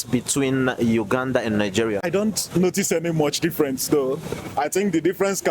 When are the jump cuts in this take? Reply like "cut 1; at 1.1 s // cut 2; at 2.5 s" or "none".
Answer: cut 1; at 2.1 s